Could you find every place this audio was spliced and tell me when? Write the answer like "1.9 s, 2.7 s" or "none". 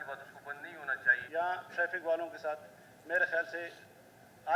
1.2 s

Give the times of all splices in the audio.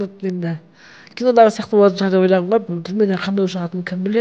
2.6 s

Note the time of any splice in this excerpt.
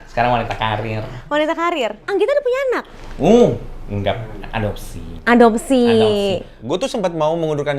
2.0 s, 6.5 s

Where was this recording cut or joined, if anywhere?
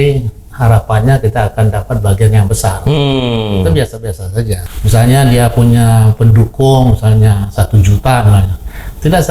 4.6 s

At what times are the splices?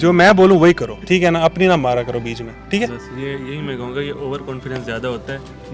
0.9 s

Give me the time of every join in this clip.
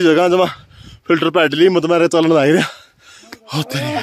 none

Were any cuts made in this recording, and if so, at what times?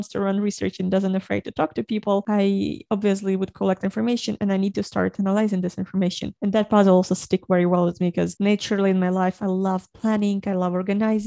none

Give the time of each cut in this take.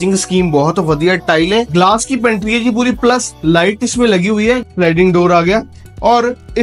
1.7 s, 4.6 s

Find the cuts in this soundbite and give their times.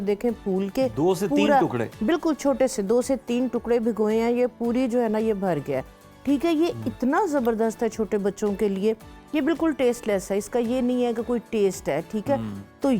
none

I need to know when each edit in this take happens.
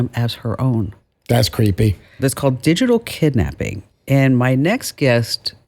2.2 s

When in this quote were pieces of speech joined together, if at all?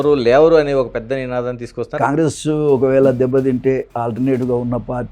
1.9 s

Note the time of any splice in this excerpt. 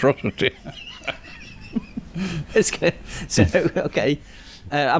none

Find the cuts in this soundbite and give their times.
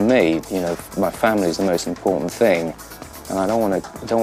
none

